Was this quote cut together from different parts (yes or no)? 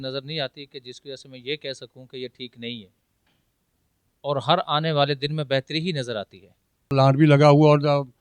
yes